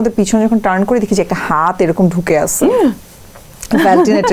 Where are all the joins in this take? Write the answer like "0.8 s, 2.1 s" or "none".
none

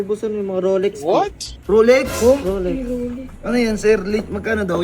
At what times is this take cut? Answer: 3.3 s

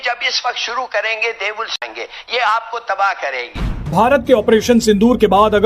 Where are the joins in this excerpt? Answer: 1.8 s, 3.7 s

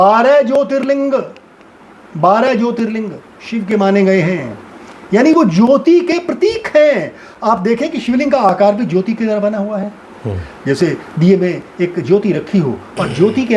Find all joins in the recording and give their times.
none

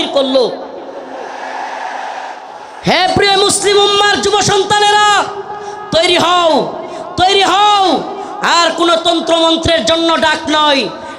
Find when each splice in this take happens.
2.4 s

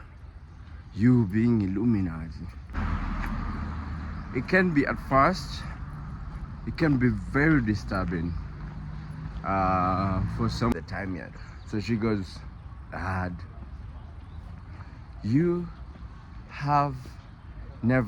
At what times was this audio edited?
2.8 s, 10.7 s

